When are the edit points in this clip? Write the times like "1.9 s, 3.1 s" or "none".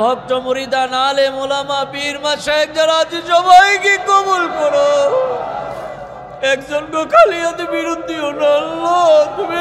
none